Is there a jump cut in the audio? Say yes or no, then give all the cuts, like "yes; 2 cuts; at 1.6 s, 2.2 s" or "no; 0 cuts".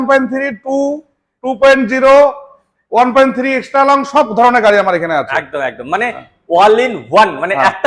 no; 0 cuts